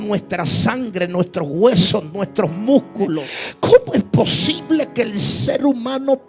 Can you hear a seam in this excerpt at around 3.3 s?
yes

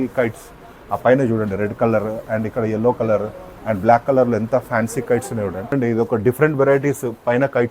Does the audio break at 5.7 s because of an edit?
yes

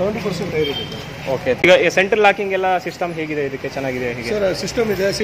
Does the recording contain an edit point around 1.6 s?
yes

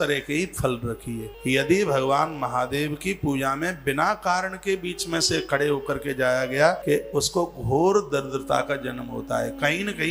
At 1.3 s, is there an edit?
yes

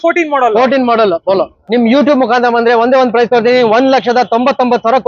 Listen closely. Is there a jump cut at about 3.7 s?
no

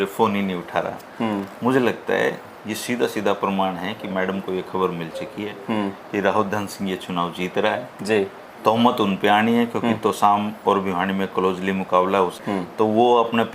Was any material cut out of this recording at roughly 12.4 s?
yes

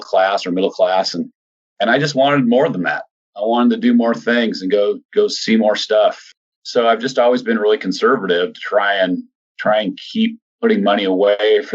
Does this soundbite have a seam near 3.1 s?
no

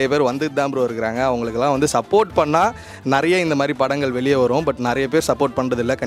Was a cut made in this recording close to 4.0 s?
no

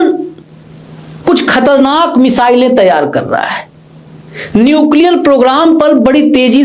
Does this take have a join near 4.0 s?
no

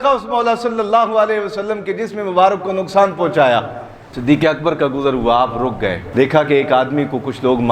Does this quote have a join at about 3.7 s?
no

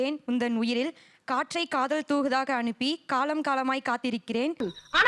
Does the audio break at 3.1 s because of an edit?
no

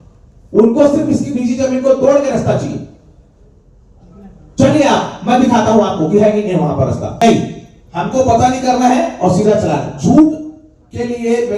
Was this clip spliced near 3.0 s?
no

